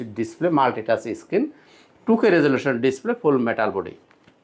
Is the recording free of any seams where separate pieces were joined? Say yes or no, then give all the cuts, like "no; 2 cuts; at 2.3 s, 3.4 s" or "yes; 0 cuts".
yes; 0 cuts